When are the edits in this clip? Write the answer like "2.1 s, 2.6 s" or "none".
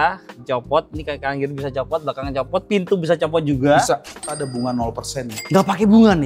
4.3 s